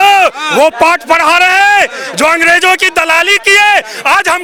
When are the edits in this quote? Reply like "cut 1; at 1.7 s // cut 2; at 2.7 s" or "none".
none

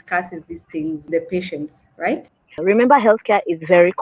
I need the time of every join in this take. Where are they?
cut 1; at 2.3 s

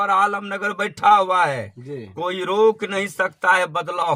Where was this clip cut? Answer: none

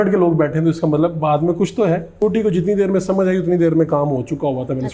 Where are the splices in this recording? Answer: cut 1; at 2.2 s

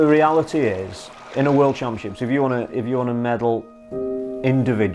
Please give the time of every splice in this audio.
cut 1; at 1.2 s

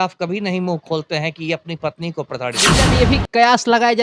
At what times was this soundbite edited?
cut 1; at 2.9 s

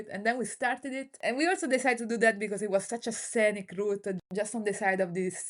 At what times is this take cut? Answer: cut 1; at 1.1 s // cut 2; at 4.2 s

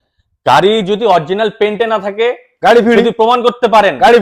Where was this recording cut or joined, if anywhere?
none

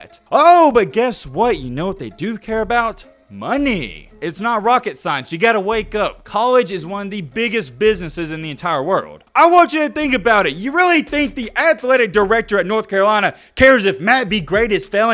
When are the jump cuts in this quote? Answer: cut 1; at 4.0 s // cut 2; at 9.2 s

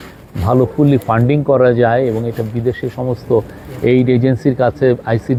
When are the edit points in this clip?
none

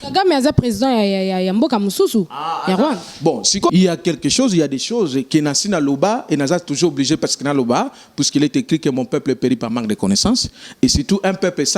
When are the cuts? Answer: cut 1; at 3.7 s

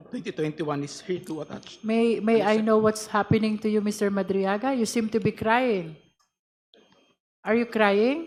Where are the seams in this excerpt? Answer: none

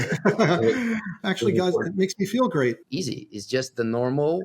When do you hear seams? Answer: cut 1; at 1.2 s // cut 2; at 2.8 s

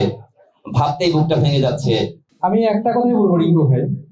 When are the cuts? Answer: cut 1; at 2.2 s

